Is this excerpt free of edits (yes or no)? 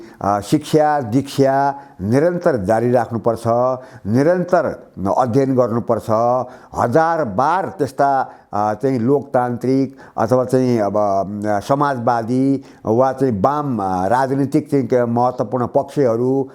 yes